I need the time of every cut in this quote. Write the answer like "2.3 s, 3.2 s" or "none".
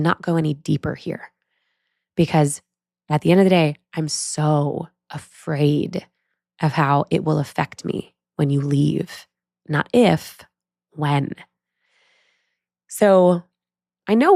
none